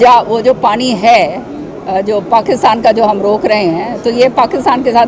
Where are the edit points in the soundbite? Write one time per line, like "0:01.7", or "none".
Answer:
none